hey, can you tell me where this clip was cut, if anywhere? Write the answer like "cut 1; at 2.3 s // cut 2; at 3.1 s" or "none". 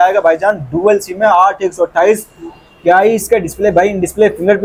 none